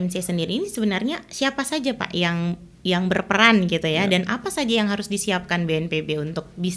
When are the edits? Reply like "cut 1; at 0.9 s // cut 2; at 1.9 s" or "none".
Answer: none